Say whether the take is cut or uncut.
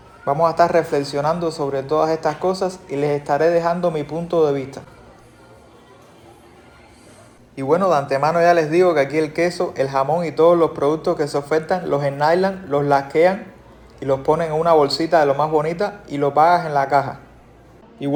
uncut